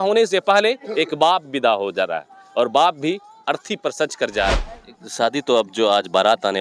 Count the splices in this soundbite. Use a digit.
1